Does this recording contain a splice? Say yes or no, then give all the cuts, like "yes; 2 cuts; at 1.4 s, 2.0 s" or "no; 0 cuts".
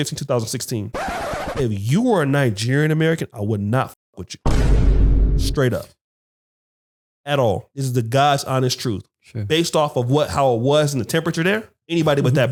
no; 0 cuts